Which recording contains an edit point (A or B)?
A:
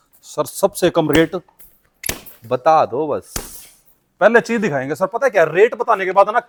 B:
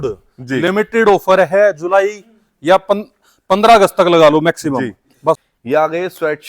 B